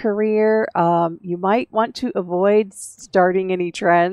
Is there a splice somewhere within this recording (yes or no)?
no